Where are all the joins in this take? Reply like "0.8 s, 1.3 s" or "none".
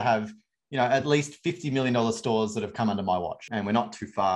3.4 s